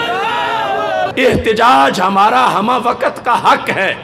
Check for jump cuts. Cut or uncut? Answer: cut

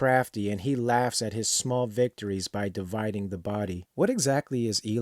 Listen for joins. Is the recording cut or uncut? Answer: cut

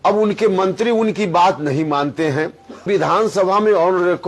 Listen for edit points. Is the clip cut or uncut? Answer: cut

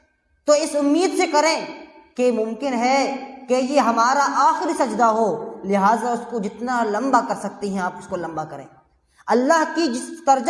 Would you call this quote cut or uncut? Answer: uncut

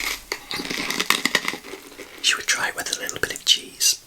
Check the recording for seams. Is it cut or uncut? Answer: cut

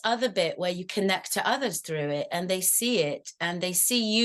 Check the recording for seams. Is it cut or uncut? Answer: uncut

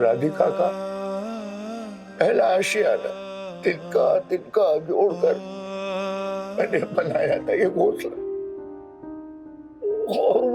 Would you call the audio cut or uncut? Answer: cut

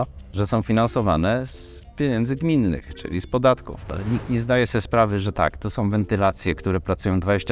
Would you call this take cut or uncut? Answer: cut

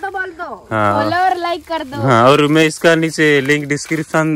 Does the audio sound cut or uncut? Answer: uncut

